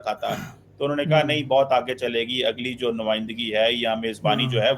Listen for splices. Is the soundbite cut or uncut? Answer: uncut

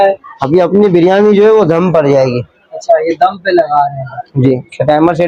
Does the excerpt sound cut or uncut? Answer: uncut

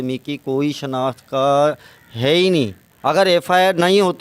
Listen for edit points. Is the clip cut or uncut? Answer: cut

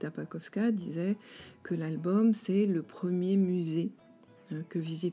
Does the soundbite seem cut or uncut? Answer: uncut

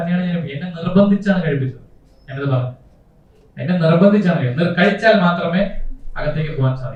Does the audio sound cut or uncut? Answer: uncut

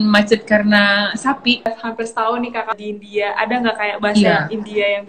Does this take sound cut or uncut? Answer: cut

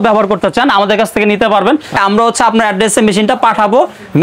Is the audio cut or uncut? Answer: cut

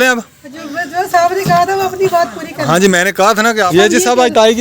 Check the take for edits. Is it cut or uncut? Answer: cut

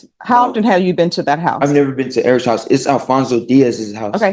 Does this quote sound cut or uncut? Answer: uncut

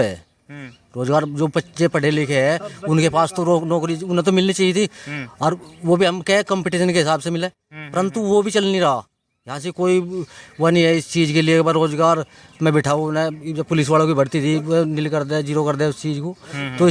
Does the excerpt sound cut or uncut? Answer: uncut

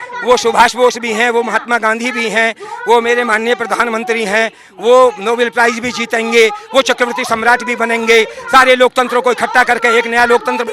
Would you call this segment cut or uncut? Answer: uncut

